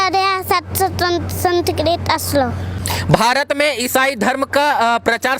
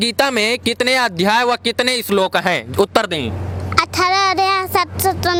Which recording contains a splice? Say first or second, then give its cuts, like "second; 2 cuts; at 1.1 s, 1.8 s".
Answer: first; 1 cut; at 2.7 s